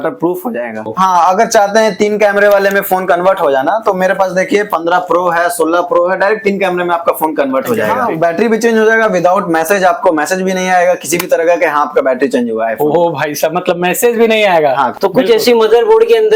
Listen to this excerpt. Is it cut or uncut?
cut